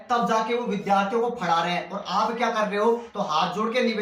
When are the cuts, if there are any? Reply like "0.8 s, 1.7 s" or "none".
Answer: 3.1 s